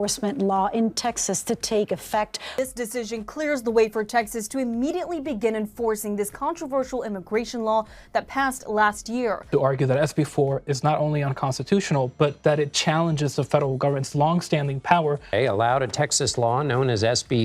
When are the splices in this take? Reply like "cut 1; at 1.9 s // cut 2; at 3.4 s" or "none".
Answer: cut 1; at 2.4 s // cut 2; at 9.4 s // cut 3; at 15.3 s